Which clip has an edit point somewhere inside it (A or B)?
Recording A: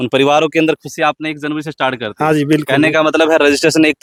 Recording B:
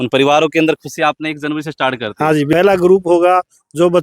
B